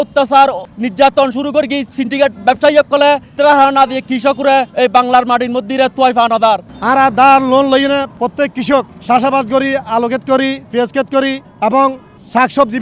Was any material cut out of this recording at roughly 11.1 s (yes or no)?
no